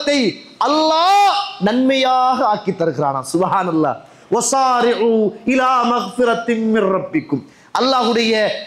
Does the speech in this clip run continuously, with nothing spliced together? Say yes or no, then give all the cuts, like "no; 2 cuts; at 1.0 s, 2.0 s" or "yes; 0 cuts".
yes; 0 cuts